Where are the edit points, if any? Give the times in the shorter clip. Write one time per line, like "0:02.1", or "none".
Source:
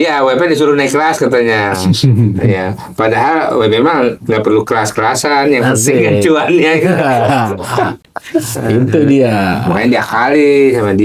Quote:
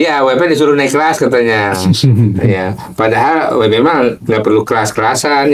none